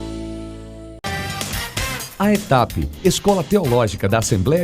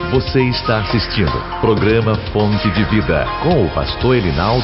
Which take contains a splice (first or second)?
first